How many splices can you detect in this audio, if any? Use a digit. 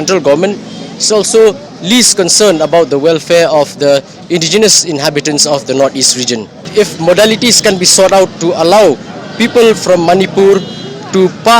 1